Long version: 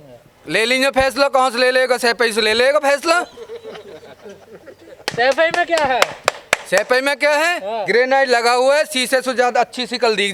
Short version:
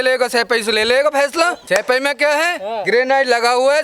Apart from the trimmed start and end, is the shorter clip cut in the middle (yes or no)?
yes